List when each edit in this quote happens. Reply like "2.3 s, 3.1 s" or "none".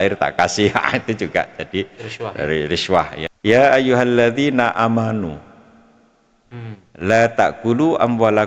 3.2 s